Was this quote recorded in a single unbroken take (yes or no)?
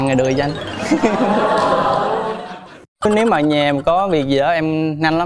no